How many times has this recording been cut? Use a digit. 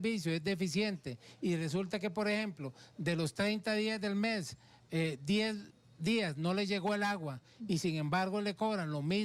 0